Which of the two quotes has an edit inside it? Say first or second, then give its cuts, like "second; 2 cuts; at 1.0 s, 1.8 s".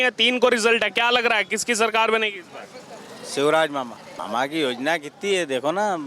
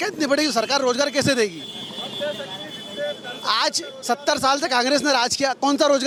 first; 1 cut; at 4.1 s